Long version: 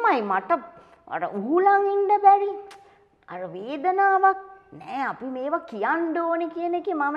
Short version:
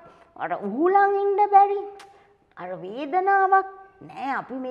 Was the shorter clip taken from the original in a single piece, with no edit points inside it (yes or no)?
yes